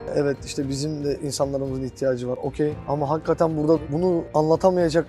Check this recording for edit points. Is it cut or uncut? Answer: cut